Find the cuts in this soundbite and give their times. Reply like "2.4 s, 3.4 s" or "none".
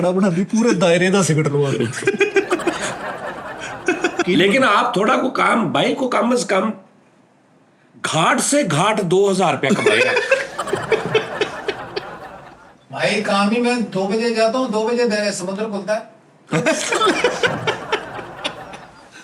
4.2 s, 12.9 s